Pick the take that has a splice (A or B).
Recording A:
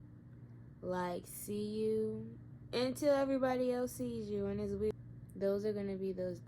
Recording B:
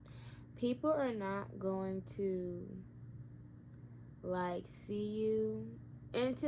A